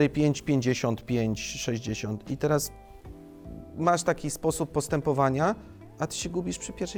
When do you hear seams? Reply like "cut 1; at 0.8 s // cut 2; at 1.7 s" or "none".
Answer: none